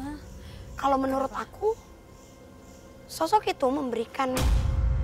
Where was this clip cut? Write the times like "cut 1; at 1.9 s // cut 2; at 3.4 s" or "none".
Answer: none